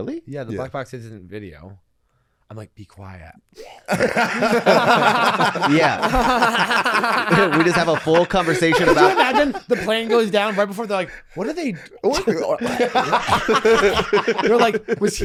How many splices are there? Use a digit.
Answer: 0